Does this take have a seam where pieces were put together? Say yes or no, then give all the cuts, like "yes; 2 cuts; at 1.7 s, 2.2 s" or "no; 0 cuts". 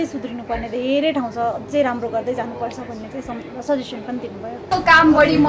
no; 0 cuts